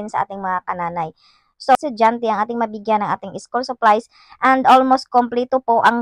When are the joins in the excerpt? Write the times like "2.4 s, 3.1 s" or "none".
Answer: 1.8 s